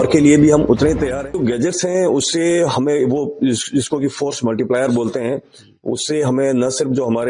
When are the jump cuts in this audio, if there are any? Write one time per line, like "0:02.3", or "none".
0:01.0